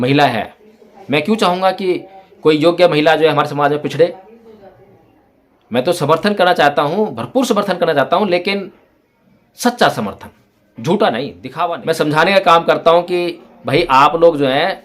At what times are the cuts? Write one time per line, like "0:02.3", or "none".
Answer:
0:11.4